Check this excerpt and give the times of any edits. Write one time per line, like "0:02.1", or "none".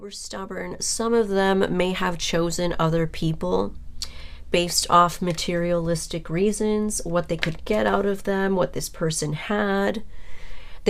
none